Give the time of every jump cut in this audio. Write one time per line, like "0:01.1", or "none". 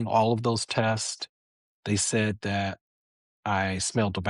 none